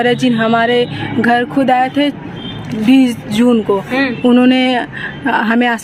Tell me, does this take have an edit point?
no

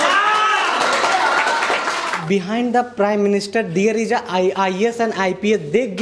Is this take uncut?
no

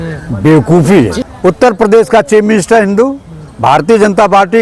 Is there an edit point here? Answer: yes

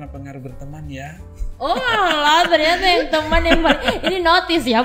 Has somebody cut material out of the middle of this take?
no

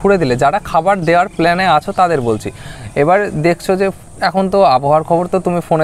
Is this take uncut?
yes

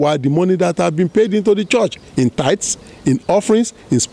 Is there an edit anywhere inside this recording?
no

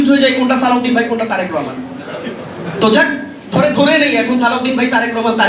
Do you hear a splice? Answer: no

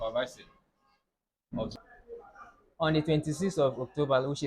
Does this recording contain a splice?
yes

